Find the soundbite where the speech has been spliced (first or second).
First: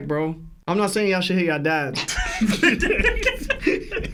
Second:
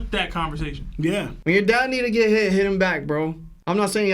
second